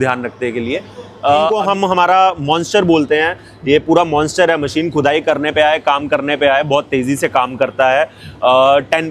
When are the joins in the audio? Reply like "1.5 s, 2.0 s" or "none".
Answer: 1.5 s

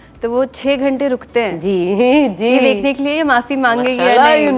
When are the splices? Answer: none

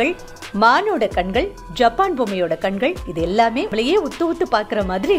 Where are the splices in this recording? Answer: 3.7 s

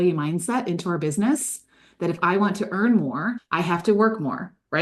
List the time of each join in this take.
3.4 s

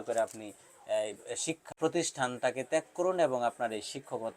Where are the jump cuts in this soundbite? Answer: 1.7 s

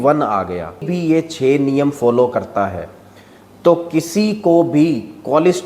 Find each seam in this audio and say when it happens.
0.9 s

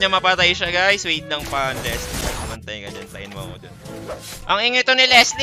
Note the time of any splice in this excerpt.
3.8 s

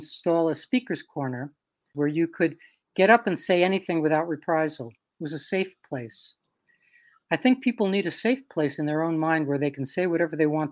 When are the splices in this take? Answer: 1.9 s

